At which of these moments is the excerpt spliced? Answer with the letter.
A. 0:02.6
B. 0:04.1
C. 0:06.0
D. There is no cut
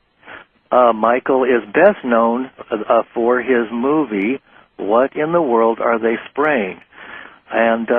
A